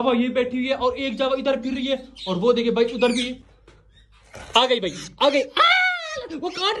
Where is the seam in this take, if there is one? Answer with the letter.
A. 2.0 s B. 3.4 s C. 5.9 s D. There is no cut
B